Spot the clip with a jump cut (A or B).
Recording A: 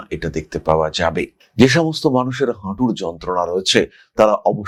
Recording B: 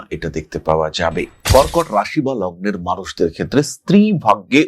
B